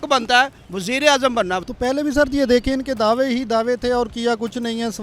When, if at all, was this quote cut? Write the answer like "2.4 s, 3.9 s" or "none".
1.6 s